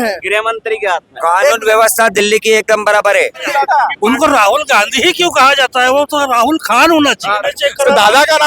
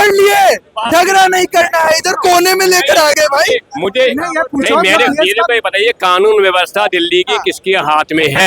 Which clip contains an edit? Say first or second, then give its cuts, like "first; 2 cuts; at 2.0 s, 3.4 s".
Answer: first; 2 cuts; at 3.4 s, 7.4 s